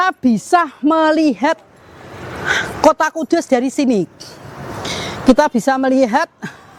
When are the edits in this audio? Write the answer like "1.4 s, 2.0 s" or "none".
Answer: none